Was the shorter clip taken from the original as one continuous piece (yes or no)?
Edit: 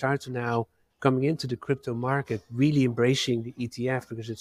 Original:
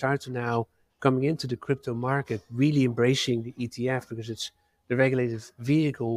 yes